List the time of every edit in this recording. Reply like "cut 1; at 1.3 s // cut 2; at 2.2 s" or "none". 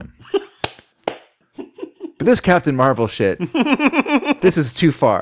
none